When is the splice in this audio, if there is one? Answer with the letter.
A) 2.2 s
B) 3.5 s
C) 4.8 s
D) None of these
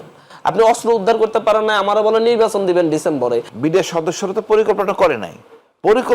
B